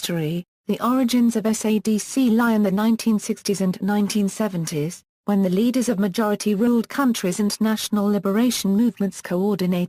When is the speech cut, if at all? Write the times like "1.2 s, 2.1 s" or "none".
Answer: none